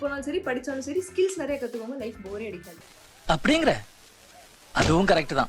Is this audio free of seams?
yes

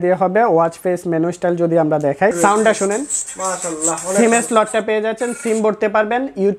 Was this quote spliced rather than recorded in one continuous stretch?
yes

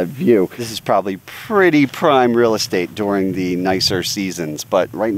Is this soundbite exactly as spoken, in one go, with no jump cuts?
yes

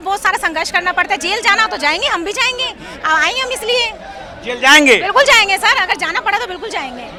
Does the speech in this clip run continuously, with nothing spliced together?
yes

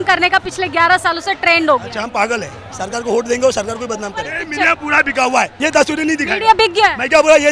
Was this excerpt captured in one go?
no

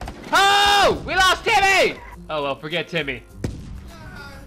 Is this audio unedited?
no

